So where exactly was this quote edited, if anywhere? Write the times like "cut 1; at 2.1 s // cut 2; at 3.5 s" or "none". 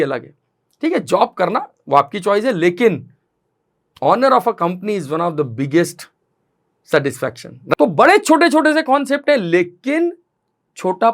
cut 1; at 7.7 s